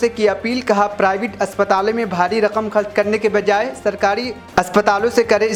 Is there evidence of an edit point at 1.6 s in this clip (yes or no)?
no